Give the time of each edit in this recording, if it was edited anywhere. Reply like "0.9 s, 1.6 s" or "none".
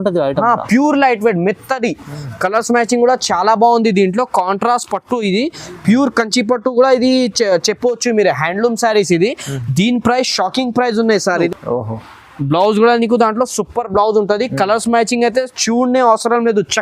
11.5 s